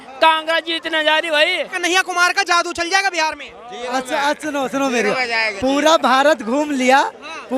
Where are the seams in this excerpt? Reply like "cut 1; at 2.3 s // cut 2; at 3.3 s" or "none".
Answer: cut 1; at 1.7 s